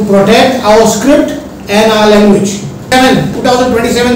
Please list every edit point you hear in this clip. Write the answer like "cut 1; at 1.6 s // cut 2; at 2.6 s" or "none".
cut 1; at 2.9 s

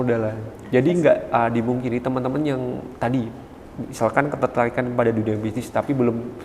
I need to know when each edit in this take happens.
none

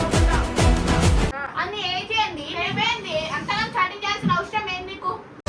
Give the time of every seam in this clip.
cut 1; at 1.4 s

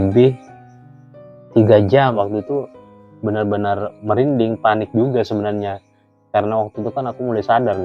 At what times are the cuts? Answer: cut 1; at 2.1 s

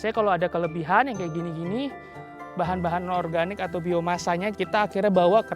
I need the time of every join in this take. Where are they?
cut 1; at 4.5 s

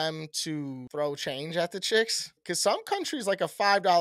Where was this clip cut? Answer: cut 1; at 0.8 s // cut 2; at 2.4 s

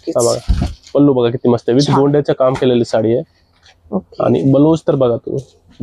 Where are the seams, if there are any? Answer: none

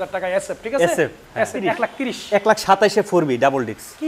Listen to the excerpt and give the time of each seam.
cut 1; at 1.6 s

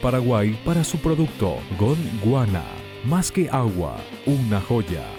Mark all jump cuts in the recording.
none

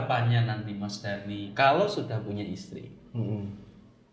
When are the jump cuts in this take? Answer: cut 1; at 1.5 s

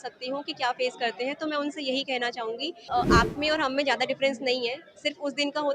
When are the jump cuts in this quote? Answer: cut 1; at 2.9 s

